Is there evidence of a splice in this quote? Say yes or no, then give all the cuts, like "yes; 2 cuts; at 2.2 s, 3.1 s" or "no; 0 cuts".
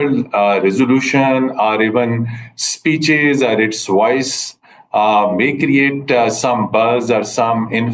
no; 0 cuts